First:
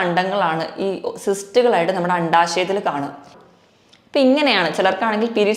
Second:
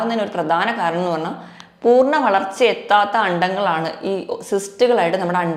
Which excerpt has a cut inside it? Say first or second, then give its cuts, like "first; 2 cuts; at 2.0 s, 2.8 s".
first; 1 cut; at 3.3 s